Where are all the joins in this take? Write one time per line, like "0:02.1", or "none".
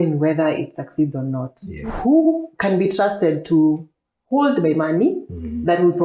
0:01.9